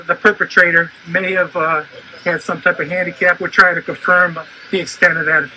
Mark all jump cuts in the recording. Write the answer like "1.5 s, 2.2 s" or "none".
none